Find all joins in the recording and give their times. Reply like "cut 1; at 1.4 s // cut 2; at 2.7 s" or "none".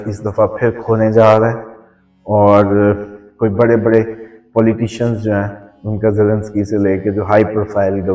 none